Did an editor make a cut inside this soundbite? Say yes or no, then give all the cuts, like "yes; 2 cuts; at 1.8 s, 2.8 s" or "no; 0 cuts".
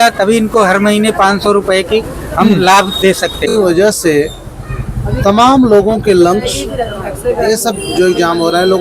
yes; 1 cut; at 3.5 s